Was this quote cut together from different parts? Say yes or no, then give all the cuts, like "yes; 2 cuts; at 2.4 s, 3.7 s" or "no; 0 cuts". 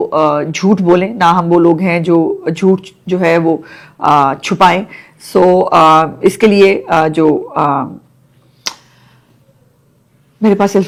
no; 0 cuts